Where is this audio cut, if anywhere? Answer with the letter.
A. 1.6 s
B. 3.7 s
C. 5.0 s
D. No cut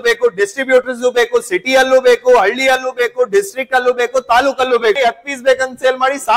C